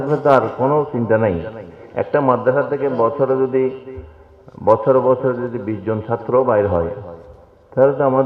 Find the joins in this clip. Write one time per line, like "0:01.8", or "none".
none